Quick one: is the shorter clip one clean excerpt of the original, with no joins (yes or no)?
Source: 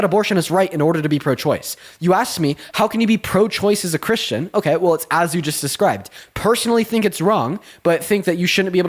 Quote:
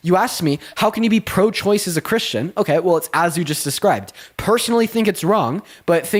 yes